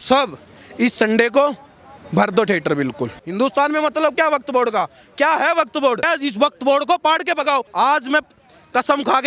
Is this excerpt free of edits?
no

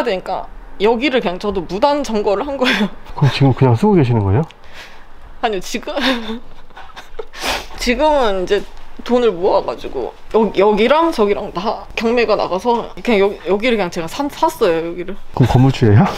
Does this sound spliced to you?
no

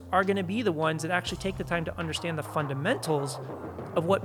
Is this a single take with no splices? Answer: yes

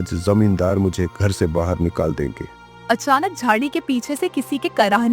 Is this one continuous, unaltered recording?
no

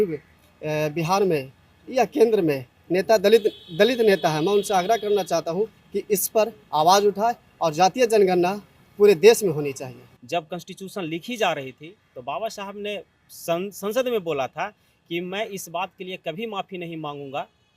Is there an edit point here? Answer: yes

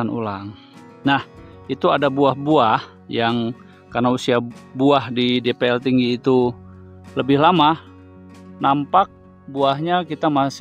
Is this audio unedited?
yes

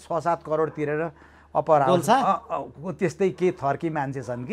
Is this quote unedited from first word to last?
yes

